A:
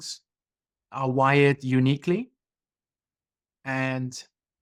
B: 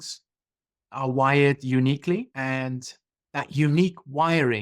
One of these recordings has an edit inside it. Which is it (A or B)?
B